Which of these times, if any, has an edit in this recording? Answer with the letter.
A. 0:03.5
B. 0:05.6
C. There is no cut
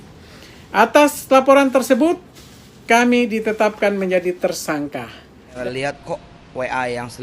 B